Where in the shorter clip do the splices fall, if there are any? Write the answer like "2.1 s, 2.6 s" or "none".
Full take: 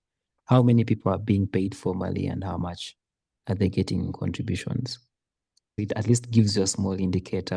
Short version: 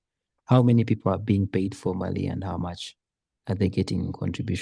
none

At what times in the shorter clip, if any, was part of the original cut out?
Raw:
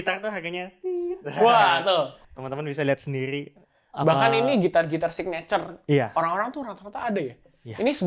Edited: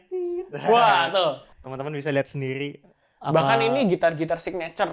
none

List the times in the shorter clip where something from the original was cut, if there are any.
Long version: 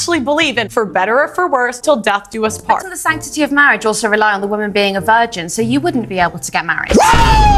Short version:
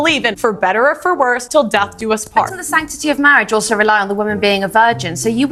none

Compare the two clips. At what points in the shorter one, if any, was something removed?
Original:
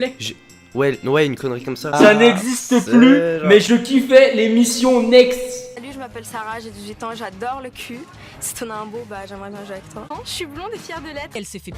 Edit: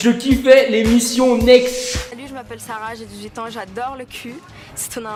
none

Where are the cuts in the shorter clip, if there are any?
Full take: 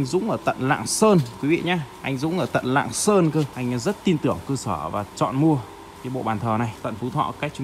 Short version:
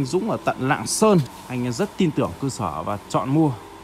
1.4 s

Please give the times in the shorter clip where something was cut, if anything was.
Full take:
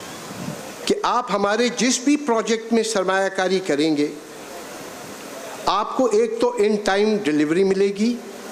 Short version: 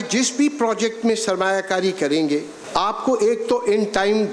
2.6 s

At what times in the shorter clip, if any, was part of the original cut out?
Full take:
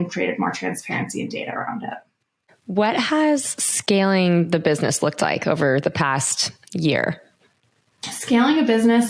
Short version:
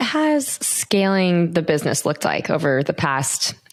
none

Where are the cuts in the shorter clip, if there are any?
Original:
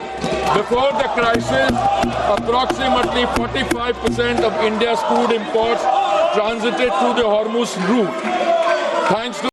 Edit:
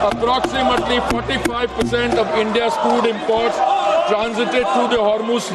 none

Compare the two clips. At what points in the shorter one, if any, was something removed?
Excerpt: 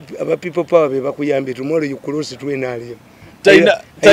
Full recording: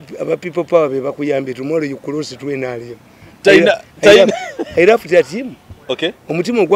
none

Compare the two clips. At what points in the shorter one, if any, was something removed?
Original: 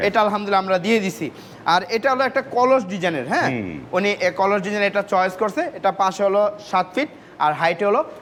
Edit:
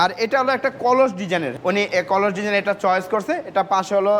1.5 s

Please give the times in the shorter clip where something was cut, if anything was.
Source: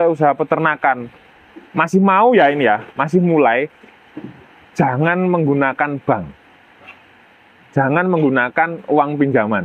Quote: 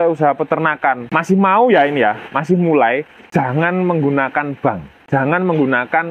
1.1 s, 3.2 s, 4.9 s

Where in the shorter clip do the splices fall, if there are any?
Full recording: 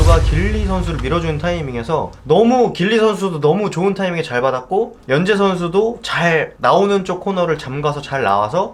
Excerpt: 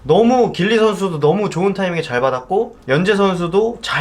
none

